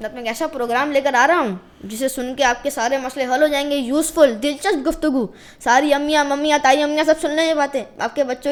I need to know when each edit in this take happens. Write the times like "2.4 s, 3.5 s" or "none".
none